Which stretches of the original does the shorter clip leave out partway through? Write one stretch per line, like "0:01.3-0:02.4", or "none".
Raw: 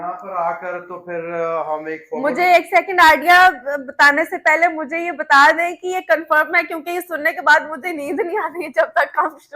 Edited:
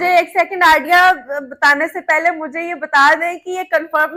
none

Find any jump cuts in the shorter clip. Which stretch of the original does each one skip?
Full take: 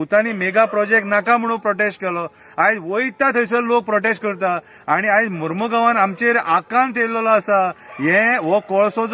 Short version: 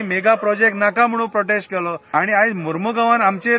0:02.3-0:04.8

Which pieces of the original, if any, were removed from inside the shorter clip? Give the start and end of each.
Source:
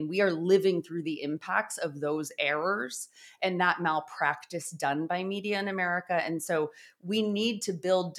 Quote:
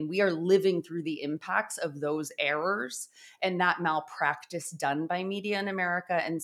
none

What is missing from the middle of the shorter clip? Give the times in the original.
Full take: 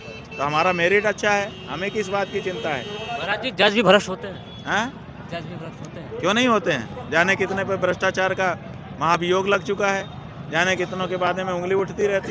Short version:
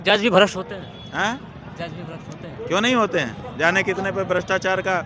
none

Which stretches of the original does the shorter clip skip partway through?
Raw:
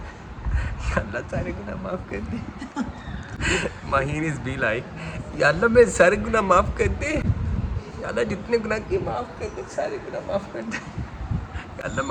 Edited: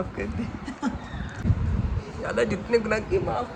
0:03.4-0:07.2

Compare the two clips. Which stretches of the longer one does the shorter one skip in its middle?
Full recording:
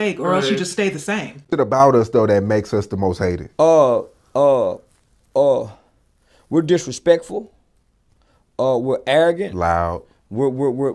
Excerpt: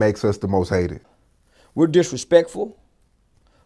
0:03.5-0:05.7

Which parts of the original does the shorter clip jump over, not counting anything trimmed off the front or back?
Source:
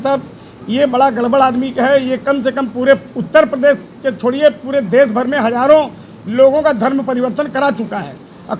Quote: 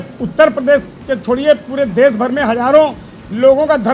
none

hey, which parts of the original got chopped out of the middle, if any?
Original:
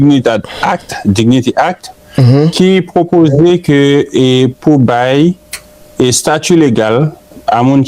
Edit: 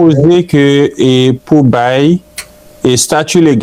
none

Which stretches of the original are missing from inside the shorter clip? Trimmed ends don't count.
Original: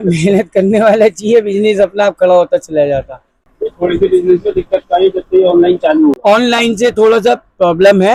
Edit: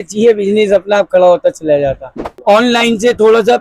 0:03.5-0:06.2

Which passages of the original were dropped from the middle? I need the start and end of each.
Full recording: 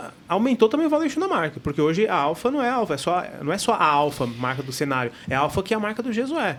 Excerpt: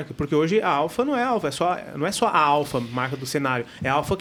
none

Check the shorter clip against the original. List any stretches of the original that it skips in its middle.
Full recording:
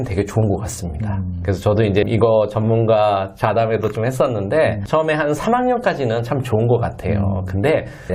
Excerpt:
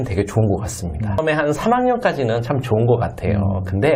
0:01.2-0:05.0

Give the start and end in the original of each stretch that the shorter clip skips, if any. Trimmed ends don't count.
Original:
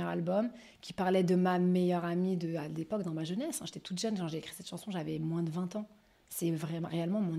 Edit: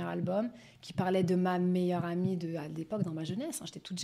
none

